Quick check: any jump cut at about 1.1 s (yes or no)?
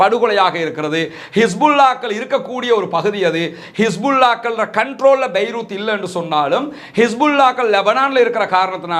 no